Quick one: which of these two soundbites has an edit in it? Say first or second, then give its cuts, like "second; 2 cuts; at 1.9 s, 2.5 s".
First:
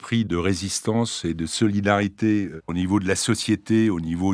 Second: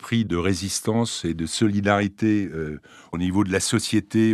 first; 1 cut; at 2.6 s